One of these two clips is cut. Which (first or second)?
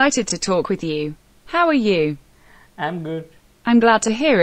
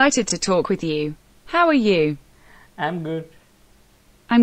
first